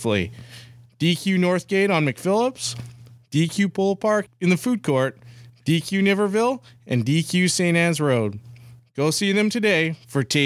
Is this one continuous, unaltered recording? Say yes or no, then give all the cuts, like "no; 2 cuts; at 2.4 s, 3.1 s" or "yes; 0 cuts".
no; 1 cut; at 4.3 s